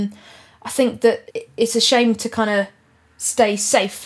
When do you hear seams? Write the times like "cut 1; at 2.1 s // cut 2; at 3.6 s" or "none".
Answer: cut 1; at 1.3 s

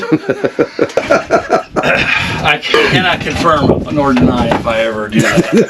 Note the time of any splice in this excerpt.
cut 1; at 1.0 s // cut 2; at 2.7 s

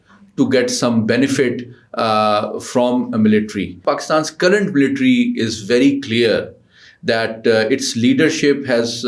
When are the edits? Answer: cut 1; at 3.8 s

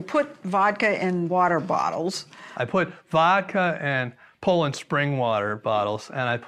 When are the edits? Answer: cut 1; at 1.3 s

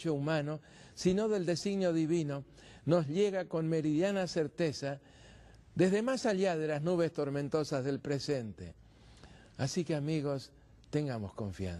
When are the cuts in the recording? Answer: none

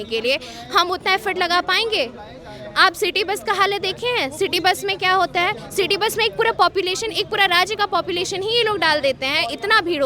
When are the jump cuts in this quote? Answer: none

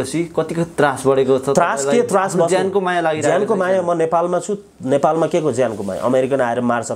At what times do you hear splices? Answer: none

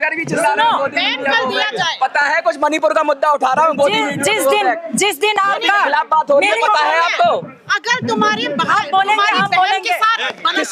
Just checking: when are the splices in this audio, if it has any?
none

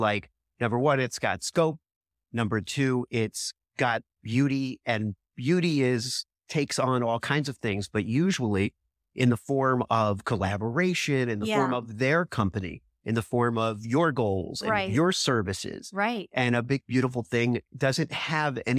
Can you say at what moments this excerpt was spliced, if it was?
none

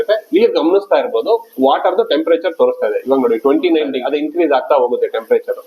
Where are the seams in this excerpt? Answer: cut 1; at 4.0 s

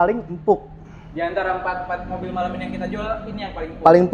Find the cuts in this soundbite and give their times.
none

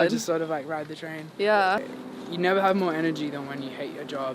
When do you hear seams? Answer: cut 1; at 1.9 s

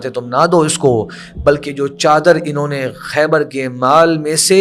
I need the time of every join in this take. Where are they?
none

